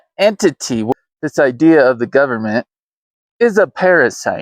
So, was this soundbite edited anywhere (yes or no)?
yes